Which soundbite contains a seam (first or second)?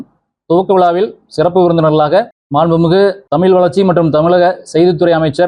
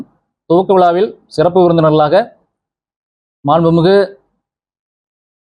first